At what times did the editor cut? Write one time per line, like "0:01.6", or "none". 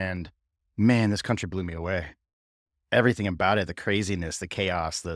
none